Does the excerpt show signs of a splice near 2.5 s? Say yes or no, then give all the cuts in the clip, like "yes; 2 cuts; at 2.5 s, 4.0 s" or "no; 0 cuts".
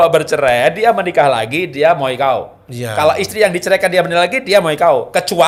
no; 0 cuts